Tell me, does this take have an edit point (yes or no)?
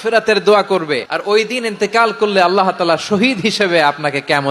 yes